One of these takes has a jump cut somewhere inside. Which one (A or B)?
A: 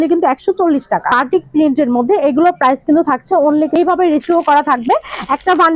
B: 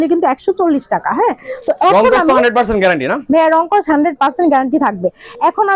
A